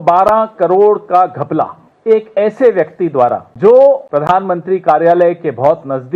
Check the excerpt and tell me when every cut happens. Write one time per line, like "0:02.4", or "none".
0:01.9
0:03.5
0:04.0